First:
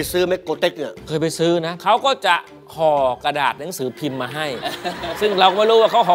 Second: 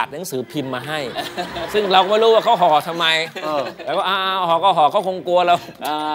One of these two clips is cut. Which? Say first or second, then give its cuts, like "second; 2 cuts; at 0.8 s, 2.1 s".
first; 2 cuts; at 0.9 s, 1.8 s